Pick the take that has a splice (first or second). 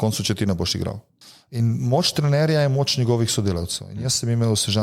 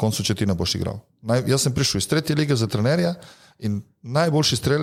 first